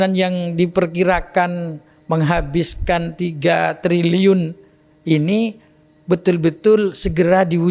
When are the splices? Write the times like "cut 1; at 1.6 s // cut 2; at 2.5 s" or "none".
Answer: none